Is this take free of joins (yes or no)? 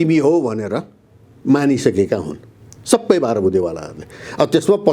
yes